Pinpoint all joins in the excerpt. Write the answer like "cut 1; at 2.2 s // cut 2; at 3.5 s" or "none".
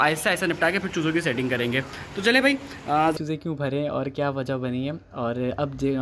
cut 1; at 3.1 s